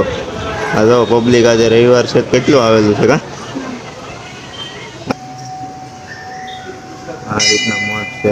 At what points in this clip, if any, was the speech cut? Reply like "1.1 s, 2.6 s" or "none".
5.1 s